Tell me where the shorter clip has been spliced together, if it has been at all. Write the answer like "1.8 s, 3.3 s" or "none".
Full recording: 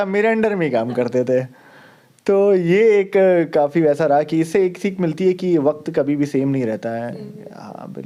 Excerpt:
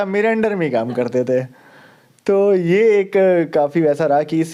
none